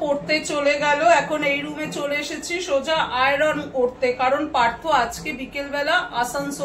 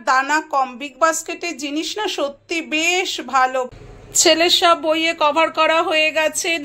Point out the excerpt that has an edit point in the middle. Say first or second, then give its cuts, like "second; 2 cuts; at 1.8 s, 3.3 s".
second; 1 cut; at 3.7 s